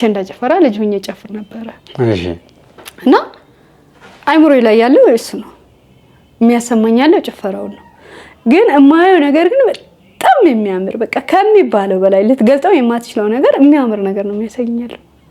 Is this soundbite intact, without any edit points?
yes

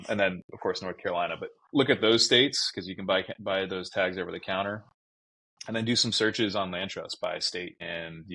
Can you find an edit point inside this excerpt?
no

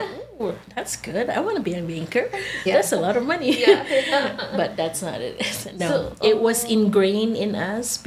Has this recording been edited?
no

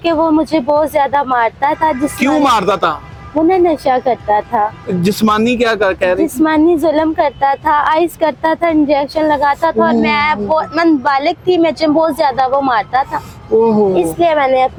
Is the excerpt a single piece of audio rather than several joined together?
yes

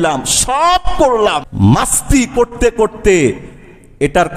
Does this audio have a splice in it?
yes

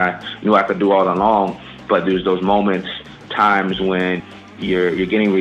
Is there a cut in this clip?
yes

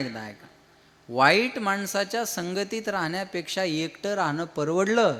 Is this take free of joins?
yes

